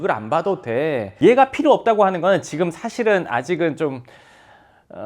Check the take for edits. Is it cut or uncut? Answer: cut